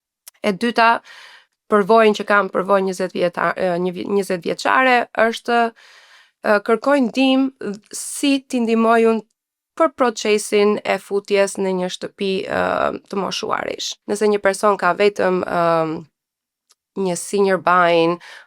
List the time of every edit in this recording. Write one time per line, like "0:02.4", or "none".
0:13.9